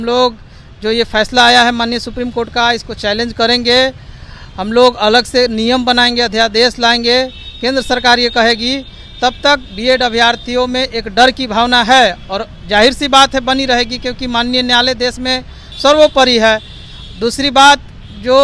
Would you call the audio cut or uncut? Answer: uncut